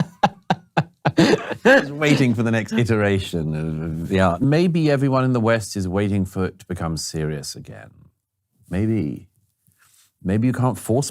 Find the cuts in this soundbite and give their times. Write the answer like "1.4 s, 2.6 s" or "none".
4.4 s